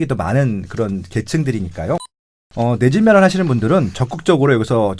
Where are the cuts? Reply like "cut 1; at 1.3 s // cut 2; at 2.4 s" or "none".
none